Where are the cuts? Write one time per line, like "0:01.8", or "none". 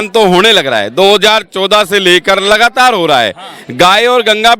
none

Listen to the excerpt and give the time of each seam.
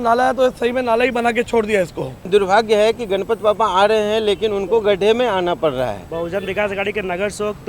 0:02.3
0:06.1

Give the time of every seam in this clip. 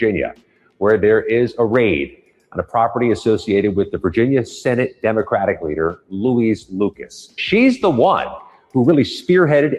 0:07.4

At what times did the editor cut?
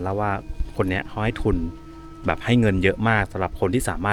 none

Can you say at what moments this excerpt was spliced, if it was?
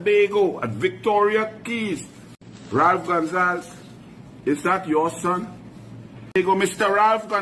0:06.2

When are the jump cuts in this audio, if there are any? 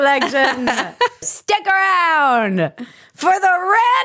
0:01.3

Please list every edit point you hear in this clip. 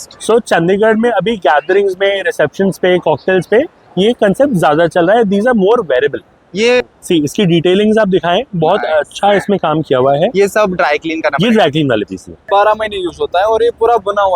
0:06.9
0:12.5

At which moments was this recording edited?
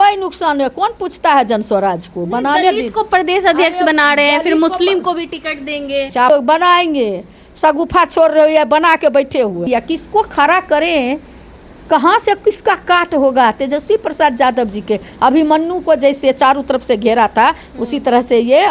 0:06.3
0:09.7

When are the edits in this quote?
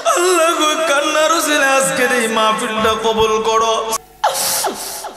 0:03.9

